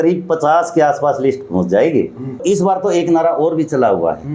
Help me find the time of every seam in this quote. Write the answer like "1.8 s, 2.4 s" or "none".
2.4 s